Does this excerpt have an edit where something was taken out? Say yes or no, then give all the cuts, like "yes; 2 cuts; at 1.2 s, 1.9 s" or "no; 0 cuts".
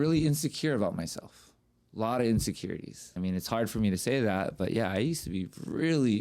yes; 1 cut; at 3.0 s